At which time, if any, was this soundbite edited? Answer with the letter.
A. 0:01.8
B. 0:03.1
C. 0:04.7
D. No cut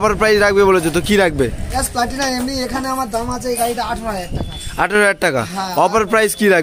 A